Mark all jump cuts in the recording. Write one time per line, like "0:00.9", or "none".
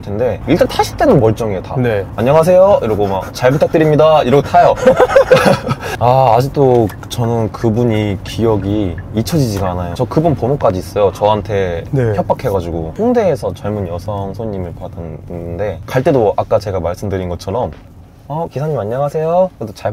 0:02.1
0:05.9
0:09.9
0:15.8